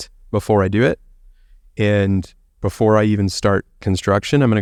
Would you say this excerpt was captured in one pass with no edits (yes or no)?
yes